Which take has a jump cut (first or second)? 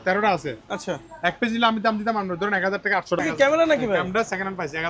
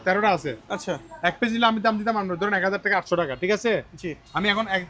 first